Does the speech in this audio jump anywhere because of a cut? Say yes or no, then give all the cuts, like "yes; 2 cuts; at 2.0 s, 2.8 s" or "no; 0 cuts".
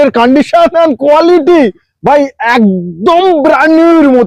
no; 0 cuts